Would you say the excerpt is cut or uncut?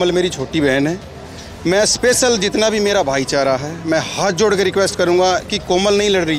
uncut